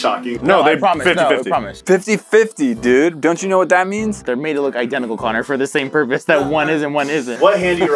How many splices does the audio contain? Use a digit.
0